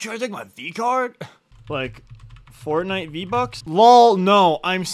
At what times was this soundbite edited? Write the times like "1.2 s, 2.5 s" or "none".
1.5 s, 3.6 s